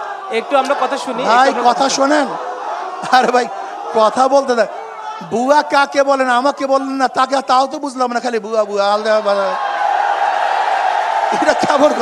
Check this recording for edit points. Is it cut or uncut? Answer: uncut